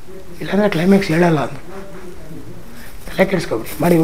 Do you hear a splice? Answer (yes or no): no